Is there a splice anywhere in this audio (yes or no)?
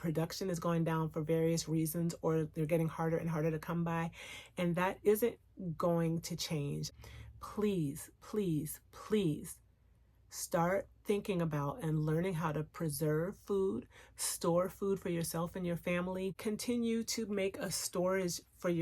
yes